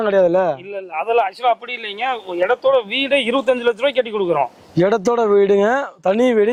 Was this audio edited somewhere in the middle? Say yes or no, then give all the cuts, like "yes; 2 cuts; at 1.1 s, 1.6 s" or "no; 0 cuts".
no; 0 cuts